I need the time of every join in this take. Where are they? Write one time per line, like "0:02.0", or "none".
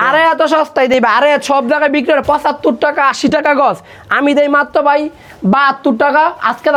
none